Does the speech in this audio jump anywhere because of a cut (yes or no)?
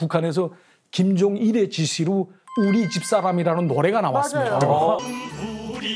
yes